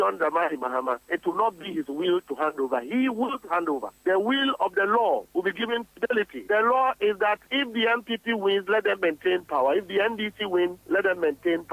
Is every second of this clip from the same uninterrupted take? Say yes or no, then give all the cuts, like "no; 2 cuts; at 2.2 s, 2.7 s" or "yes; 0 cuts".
no; 1 cut; at 10.8 s